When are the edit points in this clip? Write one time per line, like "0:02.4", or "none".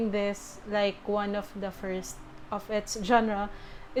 none